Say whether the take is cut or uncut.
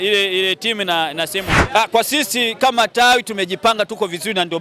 cut